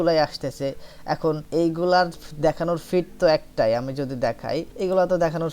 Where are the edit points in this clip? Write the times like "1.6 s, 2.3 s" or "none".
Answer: 1.4 s, 4.7 s